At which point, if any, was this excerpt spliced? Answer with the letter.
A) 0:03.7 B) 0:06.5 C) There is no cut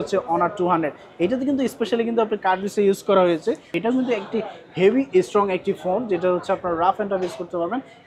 A